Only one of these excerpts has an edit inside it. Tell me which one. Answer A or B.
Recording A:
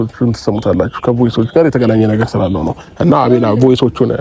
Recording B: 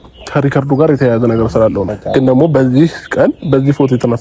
B